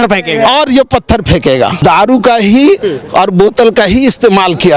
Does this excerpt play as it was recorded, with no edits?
no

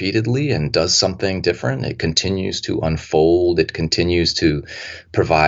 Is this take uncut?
yes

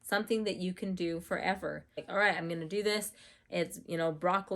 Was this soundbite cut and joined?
yes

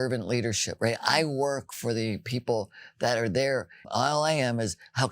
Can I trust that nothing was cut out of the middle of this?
no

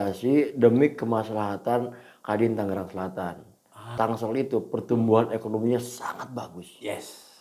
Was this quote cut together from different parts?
yes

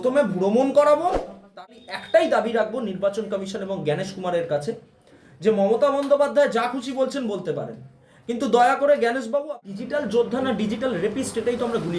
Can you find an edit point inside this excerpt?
yes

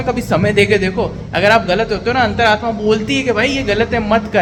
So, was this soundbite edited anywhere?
no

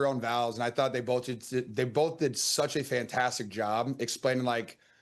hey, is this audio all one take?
yes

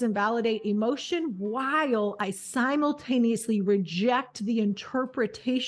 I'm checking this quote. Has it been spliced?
no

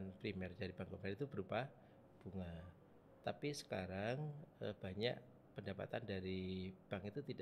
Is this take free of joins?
yes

